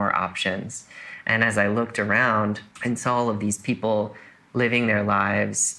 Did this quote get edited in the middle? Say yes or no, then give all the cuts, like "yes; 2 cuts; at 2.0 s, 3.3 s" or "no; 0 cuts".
yes; 1 cut; at 2.7 s